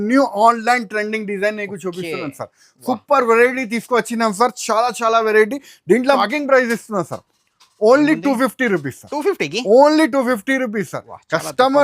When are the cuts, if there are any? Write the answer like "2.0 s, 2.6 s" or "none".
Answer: 6.2 s